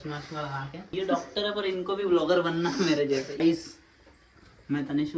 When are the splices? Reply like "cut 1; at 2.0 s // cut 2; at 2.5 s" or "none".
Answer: cut 1; at 0.9 s // cut 2; at 3.4 s

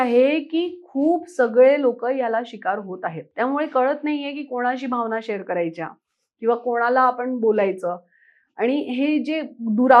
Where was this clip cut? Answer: none

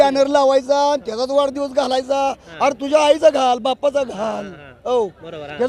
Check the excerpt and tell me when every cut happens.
none

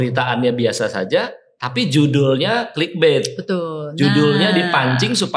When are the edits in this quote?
none

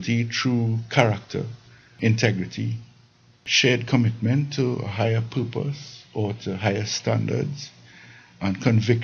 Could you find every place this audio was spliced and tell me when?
cut 1; at 2.0 s // cut 2; at 3.5 s

